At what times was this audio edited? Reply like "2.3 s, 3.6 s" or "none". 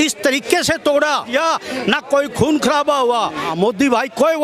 1.3 s, 3.5 s